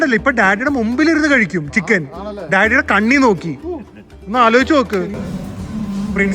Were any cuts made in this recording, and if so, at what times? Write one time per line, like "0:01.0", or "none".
0:05.2